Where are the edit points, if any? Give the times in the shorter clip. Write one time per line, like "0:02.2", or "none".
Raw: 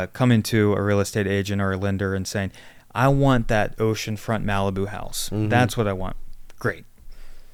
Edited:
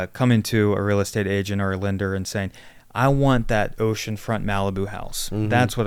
none